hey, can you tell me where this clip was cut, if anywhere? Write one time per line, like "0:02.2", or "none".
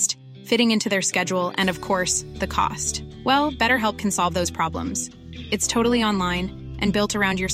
none